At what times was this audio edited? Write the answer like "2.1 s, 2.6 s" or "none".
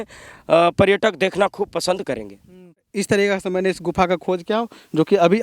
2.9 s